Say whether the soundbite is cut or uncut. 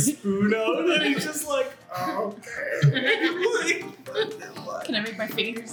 uncut